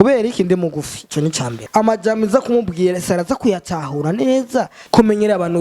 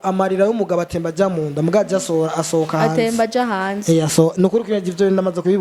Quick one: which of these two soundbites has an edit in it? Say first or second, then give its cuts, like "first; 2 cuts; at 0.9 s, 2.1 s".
first; 2 cuts; at 1.5 s, 4.8 s